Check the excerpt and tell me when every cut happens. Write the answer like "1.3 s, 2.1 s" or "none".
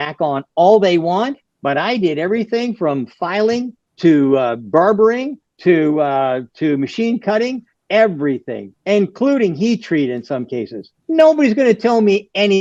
none